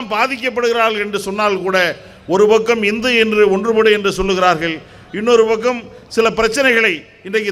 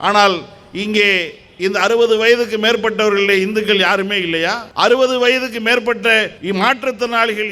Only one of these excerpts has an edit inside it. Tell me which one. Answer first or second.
second